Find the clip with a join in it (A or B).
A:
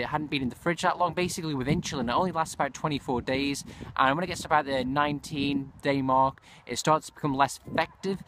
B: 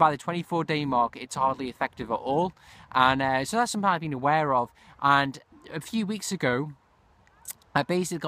A